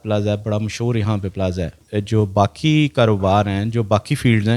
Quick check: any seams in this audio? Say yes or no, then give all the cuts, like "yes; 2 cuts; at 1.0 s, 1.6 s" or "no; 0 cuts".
yes; 1 cut; at 1.8 s